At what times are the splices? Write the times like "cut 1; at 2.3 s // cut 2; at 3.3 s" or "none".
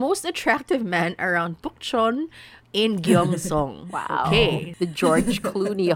cut 1; at 4.7 s